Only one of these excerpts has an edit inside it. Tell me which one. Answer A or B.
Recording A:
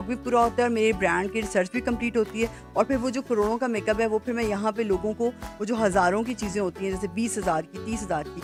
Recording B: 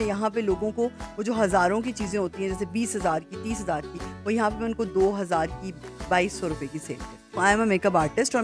B